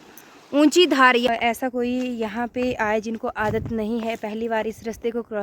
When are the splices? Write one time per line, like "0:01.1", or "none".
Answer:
0:01.3